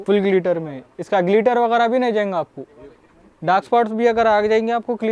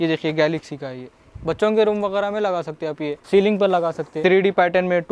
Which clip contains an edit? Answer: second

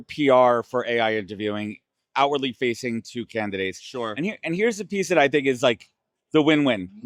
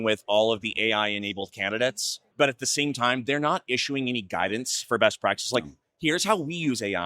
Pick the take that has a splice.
second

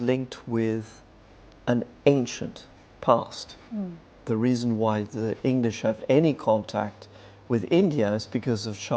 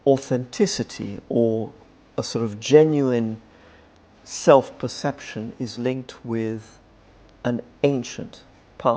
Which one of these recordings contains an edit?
first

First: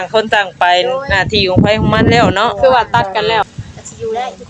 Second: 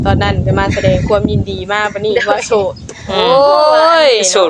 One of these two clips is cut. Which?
first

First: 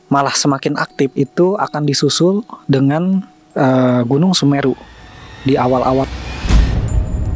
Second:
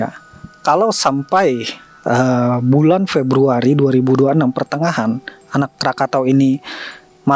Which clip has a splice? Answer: first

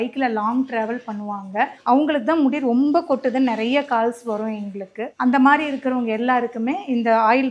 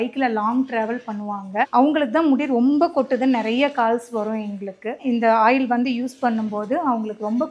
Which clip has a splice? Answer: second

